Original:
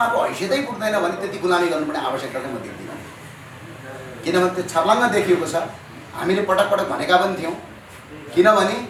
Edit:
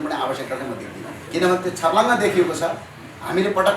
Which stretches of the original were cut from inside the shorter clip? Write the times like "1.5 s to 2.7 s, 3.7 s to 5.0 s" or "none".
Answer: 3.0 s to 4.1 s